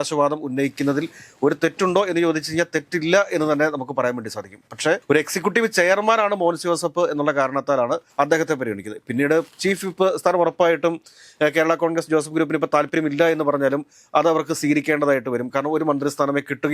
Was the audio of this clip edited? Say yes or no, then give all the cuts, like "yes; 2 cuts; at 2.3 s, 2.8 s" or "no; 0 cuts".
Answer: no; 0 cuts